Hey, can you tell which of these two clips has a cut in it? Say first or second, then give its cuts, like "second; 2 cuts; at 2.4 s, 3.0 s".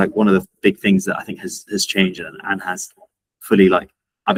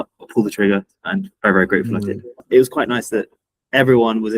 second; 2 cuts; at 1.3 s, 2.4 s